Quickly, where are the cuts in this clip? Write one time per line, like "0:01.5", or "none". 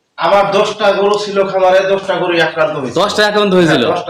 none